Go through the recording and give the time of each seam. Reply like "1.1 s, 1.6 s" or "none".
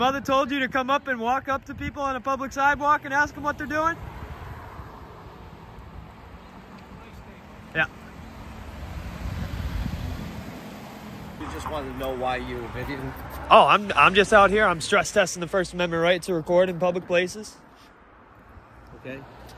11.4 s